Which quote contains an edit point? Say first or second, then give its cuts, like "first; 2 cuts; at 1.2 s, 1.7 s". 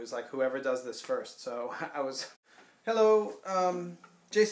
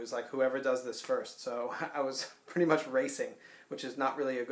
second; 1 cut; at 2.4 s